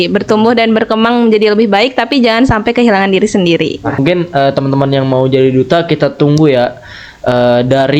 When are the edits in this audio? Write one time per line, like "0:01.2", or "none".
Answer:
0:04.0